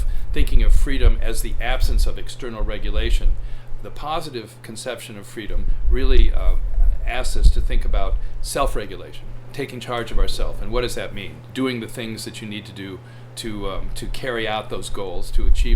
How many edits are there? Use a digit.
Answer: 2